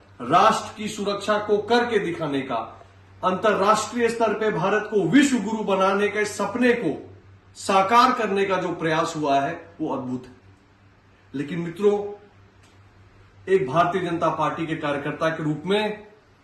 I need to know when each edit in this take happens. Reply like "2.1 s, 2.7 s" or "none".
none